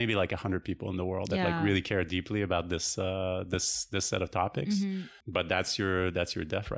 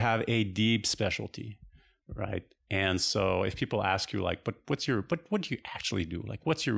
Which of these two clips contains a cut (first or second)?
first